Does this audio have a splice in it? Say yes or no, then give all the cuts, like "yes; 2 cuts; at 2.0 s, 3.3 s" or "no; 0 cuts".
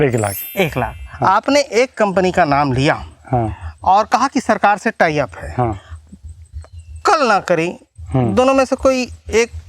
yes; 1 cut; at 1.1 s